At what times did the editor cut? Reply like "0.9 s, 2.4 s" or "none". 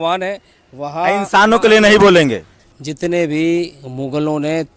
2.5 s